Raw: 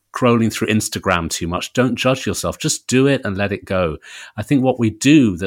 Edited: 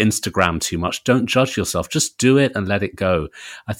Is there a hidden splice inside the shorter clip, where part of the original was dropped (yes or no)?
no